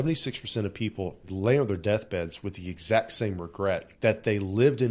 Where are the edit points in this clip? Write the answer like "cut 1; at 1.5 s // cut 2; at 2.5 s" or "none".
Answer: cut 1; at 1.3 s // cut 2; at 3.9 s